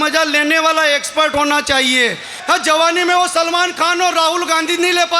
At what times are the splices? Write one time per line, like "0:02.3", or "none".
0:02.3